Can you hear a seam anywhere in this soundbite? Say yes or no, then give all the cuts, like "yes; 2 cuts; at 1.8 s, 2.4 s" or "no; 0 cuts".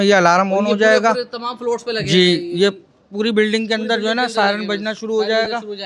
no; 0 cuts